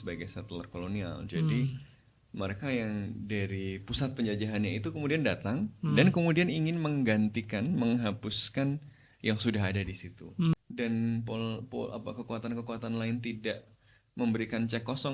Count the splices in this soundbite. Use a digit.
1